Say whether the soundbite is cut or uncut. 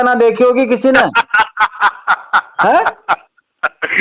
uncut